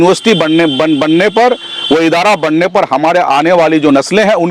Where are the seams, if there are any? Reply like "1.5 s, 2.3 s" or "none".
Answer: none